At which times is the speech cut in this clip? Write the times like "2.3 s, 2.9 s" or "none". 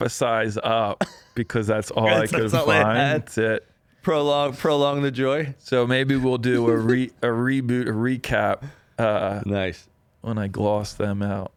none